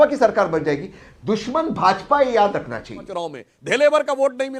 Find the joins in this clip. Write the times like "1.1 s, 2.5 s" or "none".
3.1 s